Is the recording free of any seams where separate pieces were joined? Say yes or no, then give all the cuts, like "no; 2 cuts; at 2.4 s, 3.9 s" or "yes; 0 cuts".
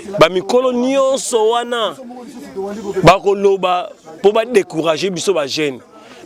yes; 0 cuts